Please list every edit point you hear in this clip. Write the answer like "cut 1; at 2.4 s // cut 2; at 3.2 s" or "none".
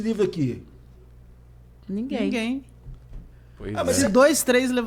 none